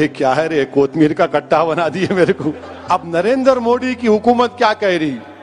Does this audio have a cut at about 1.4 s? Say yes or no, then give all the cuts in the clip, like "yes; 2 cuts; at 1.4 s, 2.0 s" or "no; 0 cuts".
no; 1 cut; at 2.7 s